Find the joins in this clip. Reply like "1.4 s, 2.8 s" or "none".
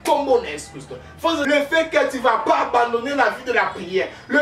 1.4 s